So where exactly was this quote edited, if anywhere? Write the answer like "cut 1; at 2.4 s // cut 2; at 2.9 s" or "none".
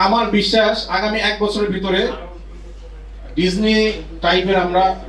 none